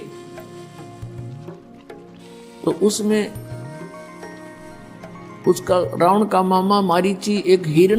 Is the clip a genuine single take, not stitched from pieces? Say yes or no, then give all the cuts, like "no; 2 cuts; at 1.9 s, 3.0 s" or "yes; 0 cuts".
yes; 0 cuts